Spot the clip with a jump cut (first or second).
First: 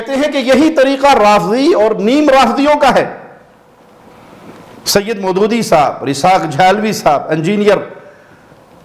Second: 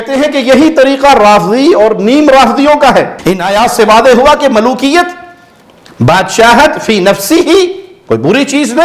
second